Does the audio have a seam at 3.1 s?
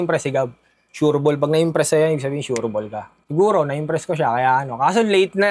yes; 1 cut; at 3.1 s

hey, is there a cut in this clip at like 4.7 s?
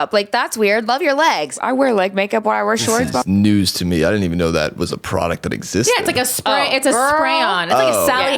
no; 2 cuts; at 1.5 s, 3.2 s

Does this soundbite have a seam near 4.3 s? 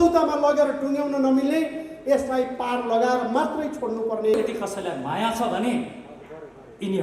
yes; 1 cut; at 4.3 s

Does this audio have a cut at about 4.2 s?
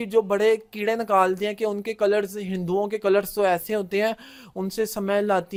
no; 0 cuts

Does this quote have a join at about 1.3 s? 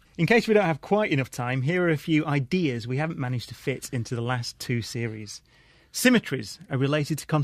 yes; 1 cut; at 1.3 s

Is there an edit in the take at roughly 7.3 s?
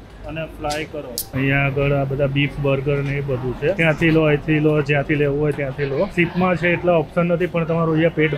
no; 3 cuts; at 1.2 s, 3.8 s, 6.1 s

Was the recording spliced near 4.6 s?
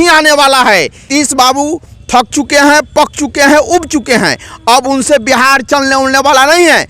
no; 1 cut; at 1.1 s

